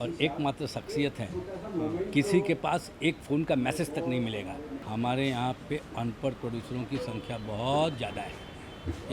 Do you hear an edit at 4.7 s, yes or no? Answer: yes